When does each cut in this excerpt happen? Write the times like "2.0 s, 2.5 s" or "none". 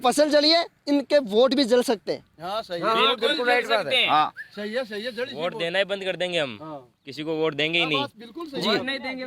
none